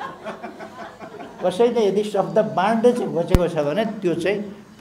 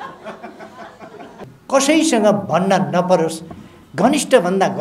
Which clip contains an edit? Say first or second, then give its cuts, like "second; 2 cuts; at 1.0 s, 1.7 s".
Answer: second; 1 cut; at 1.3 s